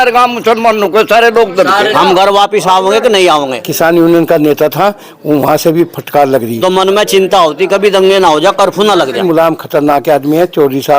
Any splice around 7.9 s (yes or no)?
no